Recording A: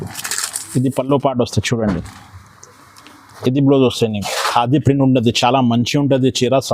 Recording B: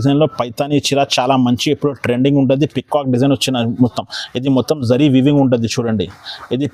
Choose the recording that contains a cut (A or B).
A